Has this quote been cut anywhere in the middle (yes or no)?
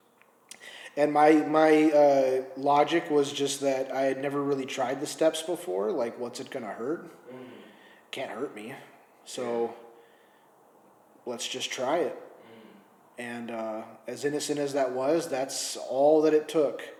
no